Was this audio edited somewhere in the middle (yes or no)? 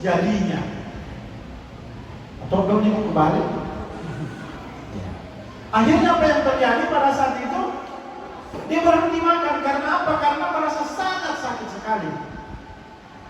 no